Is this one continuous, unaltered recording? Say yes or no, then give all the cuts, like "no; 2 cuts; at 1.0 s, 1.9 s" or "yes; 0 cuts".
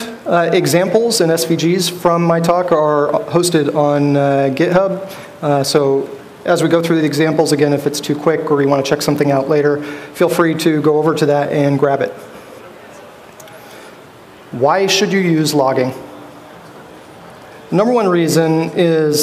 yes; 0 cuts